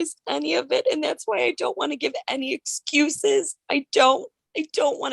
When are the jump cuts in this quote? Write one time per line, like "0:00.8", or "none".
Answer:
none